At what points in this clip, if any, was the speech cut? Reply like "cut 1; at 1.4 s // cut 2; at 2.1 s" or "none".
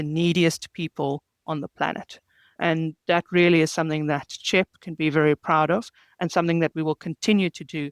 none